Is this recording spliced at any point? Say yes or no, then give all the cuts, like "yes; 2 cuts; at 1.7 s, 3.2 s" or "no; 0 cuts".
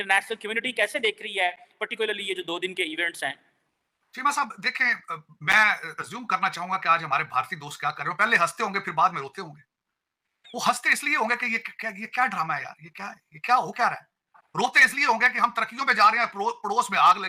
no; 0 cuts